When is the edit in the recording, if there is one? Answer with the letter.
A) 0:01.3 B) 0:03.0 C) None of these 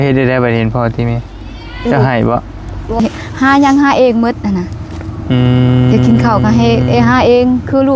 B